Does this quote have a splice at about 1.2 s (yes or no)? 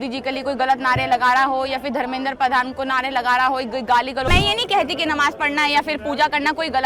no